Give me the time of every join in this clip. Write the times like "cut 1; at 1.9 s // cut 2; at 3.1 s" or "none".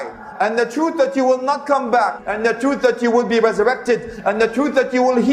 cut 1; at 2.2 s